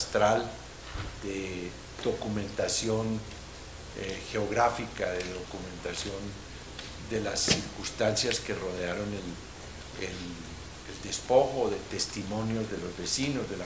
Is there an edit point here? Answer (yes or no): yes